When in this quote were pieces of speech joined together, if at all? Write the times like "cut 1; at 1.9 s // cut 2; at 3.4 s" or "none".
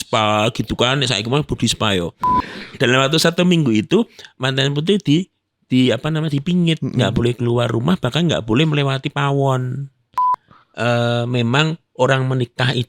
cut 1; at 2.7 s // cut 2; at 10.4 s